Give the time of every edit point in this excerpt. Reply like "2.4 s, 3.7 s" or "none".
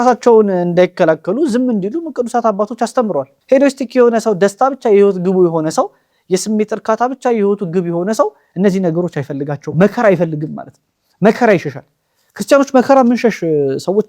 3.3 s